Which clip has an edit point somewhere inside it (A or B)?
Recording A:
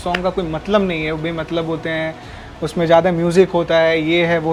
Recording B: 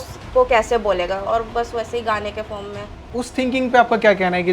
B